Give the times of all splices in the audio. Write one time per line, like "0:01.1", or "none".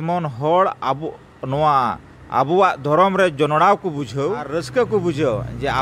0:04.6